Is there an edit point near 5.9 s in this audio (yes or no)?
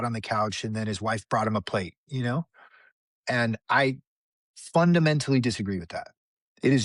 yes